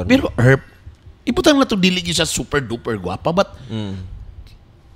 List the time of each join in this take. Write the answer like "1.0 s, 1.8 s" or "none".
none